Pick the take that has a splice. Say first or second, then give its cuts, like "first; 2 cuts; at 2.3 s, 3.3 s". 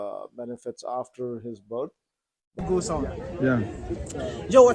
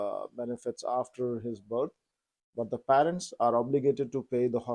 first; 1 cut; at 2.6 s